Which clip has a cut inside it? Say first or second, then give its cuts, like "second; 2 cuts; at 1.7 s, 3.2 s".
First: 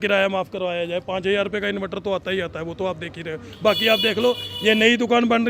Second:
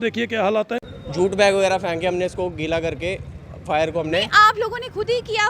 second; 1 cut; at 1.0 s